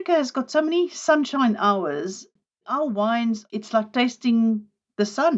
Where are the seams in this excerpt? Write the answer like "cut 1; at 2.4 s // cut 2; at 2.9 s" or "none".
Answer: cut 1; at 3.4 s